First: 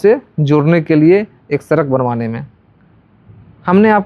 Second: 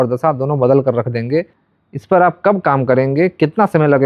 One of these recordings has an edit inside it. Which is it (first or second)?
second